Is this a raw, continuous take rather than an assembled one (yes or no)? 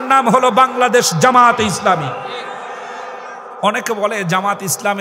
no